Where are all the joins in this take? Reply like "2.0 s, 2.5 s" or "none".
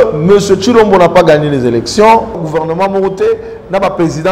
2.4 s